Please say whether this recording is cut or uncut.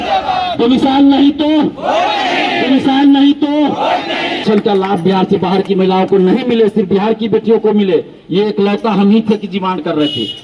cut